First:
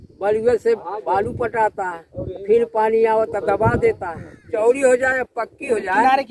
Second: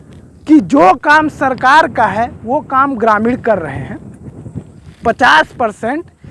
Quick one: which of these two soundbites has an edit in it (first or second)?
first